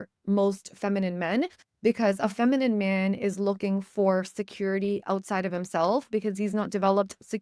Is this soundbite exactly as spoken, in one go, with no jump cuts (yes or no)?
yes